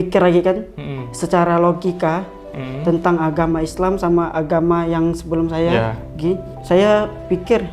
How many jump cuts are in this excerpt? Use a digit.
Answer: 1